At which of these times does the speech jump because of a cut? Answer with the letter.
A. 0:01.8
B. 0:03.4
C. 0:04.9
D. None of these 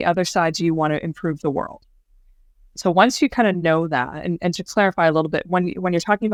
D